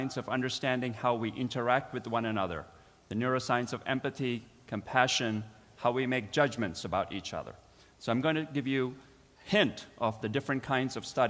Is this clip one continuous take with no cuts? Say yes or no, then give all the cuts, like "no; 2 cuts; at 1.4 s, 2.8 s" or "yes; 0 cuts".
no; 1 cut; at 1.6 s